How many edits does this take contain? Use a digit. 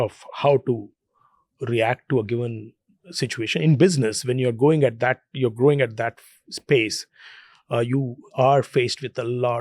0